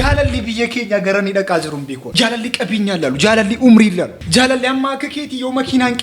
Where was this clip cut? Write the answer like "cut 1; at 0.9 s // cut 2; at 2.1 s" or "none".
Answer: cut 1; at 2.0 s